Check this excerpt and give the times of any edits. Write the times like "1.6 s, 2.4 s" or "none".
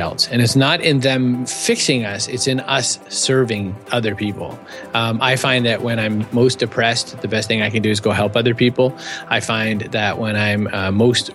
1.5 s, 3.8 s